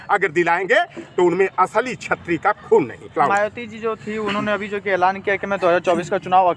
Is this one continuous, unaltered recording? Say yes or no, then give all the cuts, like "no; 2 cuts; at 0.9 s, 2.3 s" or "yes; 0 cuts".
yes; 0 cuts